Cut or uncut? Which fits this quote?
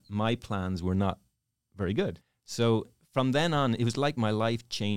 cut